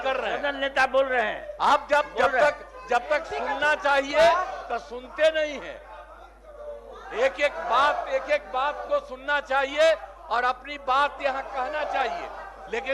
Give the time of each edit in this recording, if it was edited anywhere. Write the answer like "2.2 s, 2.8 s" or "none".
none